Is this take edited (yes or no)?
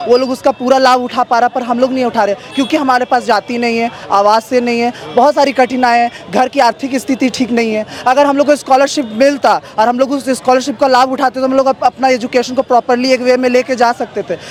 no